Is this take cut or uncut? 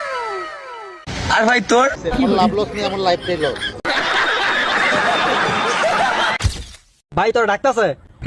cut